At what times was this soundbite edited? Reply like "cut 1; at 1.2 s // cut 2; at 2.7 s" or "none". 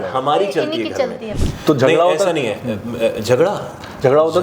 cut 1; at 1.3 s